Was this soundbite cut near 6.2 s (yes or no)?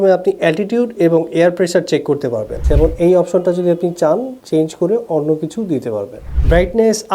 yes